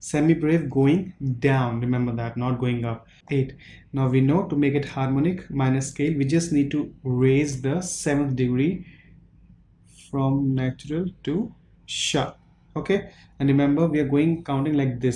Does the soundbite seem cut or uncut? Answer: cut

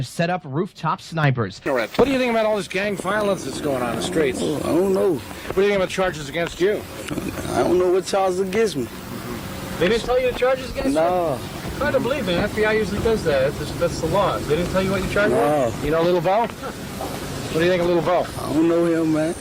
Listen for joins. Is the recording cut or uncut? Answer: cut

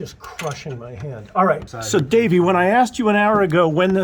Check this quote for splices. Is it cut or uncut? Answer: cut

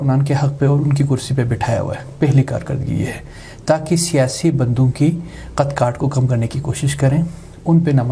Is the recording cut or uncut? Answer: uncut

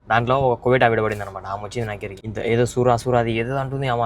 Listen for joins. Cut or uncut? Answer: cut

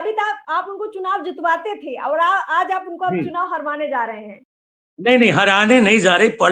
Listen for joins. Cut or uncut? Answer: uncut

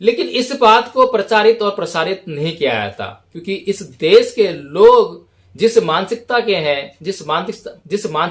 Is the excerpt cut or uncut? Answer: uncut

